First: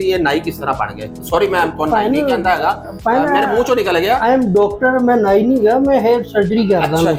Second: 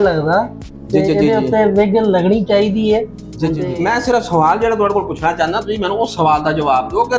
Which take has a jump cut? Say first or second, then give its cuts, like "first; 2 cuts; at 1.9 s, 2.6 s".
second; 1 cut; at 3.5 s